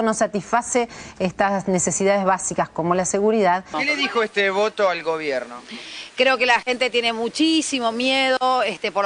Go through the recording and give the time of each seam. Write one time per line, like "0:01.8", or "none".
none